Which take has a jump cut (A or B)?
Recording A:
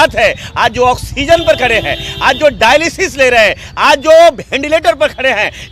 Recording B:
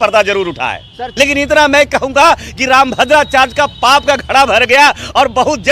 B